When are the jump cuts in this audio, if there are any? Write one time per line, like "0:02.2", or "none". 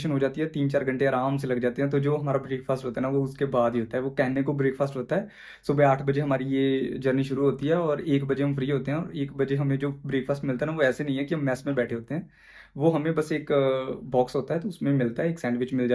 none